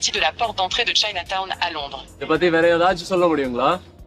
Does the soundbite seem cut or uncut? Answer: cut